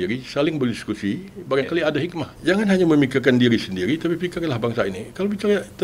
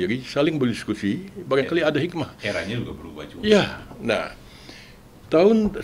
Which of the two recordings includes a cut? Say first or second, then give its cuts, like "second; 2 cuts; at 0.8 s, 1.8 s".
first; 1 cut; at 2.3 s